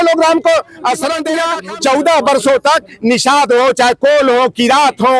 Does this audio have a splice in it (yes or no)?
yes